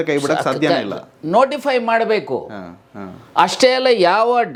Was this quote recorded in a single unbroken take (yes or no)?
yes